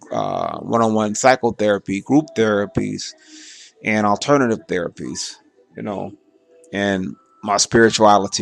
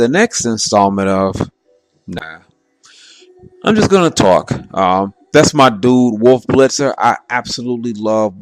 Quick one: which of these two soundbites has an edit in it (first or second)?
second